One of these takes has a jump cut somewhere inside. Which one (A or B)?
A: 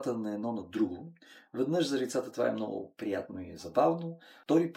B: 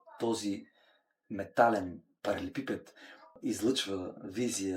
B